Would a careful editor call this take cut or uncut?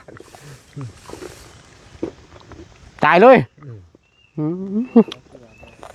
uncut